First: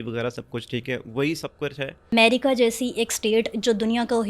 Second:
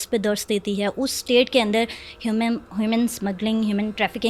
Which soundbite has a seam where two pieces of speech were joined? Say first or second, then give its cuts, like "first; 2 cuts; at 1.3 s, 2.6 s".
first; 1 cut; at 2.1 s